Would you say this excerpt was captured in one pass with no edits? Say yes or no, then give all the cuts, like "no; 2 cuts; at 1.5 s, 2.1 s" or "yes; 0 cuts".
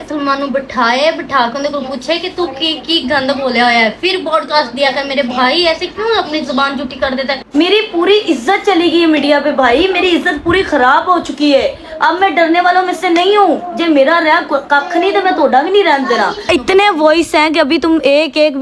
no; 2 cuts; at 7.4 s, 16.5 s